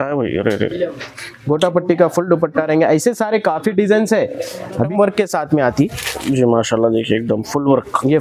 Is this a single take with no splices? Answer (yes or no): no